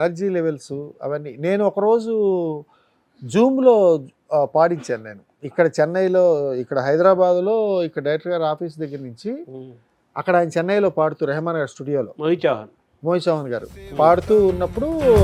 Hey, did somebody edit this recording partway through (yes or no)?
no